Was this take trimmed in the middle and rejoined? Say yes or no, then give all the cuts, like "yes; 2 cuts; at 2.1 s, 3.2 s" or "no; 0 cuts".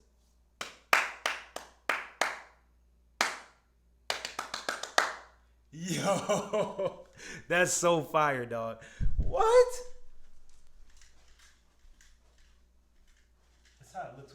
no; 0 cuts